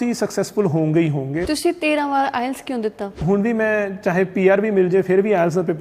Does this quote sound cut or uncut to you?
cut